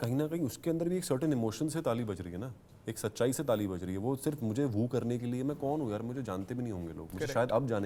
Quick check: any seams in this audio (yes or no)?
no